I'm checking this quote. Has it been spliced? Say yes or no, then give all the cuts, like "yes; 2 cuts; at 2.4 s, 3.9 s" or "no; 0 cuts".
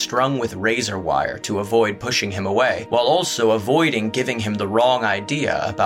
yes; 1 cut; at 2.8 s